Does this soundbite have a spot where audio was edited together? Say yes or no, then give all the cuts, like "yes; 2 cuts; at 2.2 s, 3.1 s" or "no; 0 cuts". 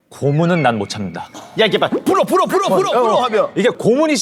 no; 0 cuts